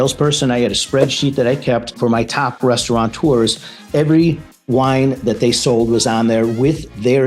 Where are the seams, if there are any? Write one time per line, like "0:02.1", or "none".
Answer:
0:02.4